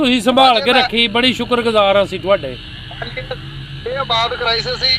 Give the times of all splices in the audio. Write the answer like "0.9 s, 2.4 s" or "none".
none